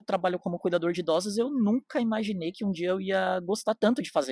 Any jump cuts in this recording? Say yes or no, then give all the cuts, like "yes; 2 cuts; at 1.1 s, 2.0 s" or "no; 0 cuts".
no; 0 cuts